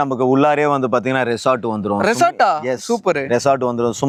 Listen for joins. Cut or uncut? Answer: uncut